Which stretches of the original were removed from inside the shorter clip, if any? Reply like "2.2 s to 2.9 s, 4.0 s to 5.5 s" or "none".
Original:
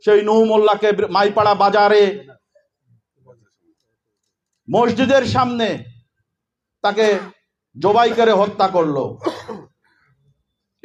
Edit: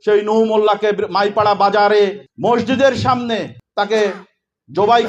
2.3 s to 4.6 s, 5.9 s to 6.6 s